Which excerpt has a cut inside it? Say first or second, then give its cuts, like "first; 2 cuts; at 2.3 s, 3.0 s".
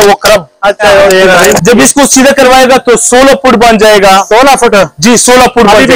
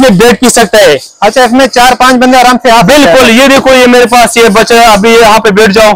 first; 1 cut; at 1.1 s